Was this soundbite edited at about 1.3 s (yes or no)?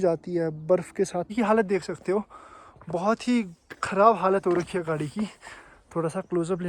yes